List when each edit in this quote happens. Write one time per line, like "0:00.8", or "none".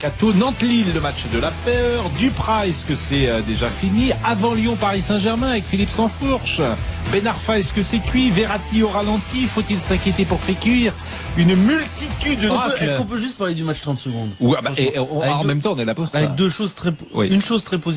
none